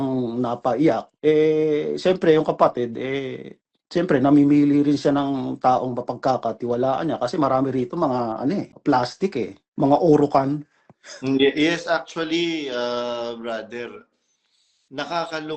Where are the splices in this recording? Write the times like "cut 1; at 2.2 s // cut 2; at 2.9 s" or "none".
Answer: cut 1; at 9.7 s

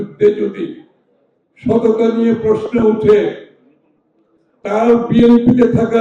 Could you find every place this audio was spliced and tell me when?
none

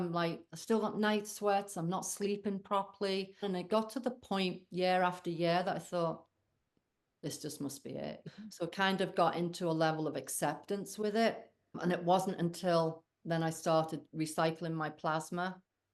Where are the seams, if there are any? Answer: cut 1; at 3.4 s // cut 2; at 8.2 s // cut 3; at 11.8 s

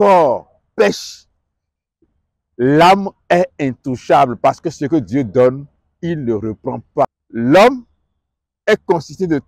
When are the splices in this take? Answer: cut 1; at 7.0 s

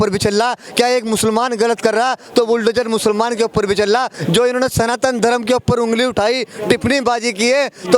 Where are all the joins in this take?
cut 1; at 4.1 s

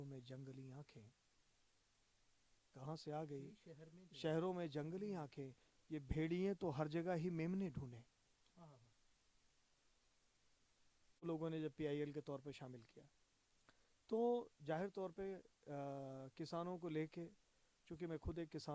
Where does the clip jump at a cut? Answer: cut 1; at 11.2 s

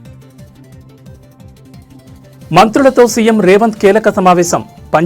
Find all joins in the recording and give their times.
cut 1; at 2.5 s

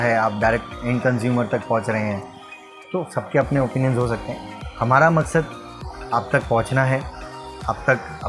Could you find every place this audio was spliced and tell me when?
none

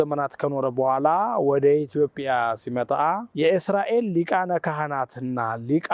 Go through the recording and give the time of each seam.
cut 1; at 3.3 s

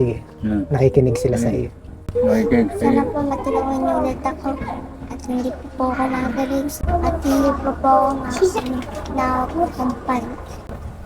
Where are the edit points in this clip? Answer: cut 1; at 6.7 s

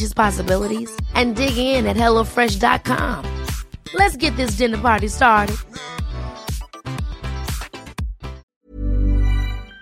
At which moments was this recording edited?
cut 1; at 8.5 s

